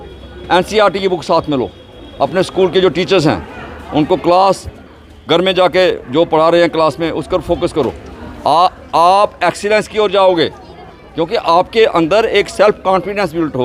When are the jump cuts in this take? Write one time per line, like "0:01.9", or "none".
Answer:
none

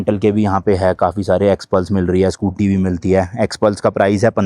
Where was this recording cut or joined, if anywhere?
none

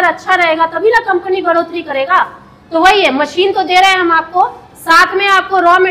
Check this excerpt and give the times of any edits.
none

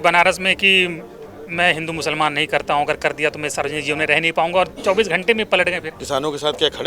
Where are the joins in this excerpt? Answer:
0:05.9

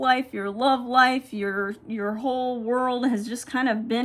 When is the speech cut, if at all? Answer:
none

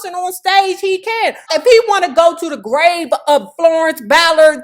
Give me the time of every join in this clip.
0:01.5

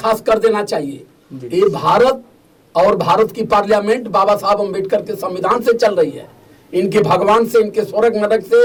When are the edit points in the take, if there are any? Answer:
none

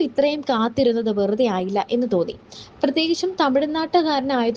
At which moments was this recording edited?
0:02.4

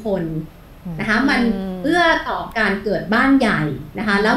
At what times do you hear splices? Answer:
none

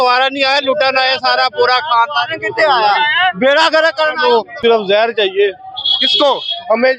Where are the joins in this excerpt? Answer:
0:04.6

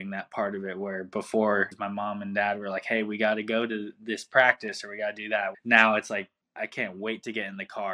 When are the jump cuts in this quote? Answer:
0:01.7
0:05.6

